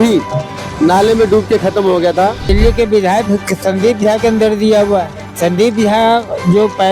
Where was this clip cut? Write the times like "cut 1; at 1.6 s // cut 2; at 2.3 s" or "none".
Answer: cut 1; at 2.4 s // cut 2; at 5.2 s